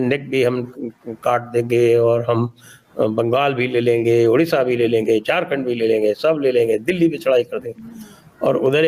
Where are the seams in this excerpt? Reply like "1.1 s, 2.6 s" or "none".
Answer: none